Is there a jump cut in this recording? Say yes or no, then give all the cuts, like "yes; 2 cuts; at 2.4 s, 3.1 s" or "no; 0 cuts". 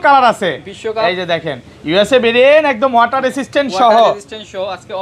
no; 0 cuts